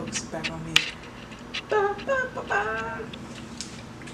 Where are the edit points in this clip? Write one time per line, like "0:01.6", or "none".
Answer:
none